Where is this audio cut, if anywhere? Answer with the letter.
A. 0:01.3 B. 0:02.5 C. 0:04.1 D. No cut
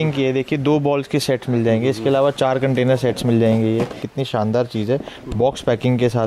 C